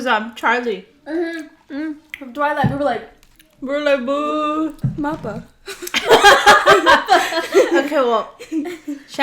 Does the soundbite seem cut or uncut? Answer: cut